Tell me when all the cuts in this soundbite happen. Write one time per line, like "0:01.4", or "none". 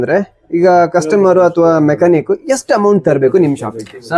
none